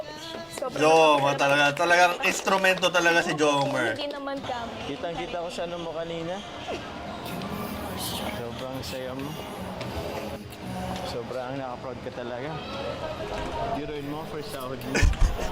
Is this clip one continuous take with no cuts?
no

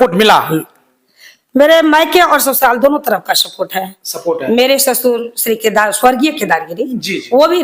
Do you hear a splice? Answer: no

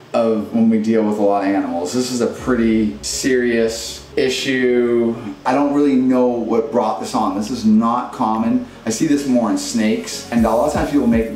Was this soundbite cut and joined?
yes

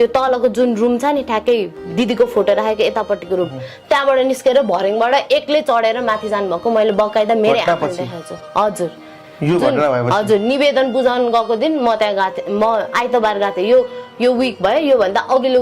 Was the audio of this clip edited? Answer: no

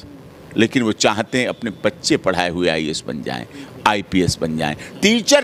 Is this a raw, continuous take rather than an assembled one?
yes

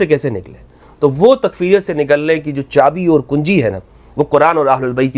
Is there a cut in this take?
no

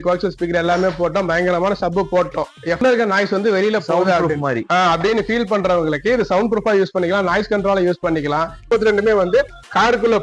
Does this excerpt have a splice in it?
yes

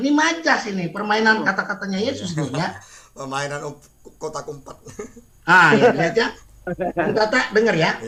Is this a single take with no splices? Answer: yes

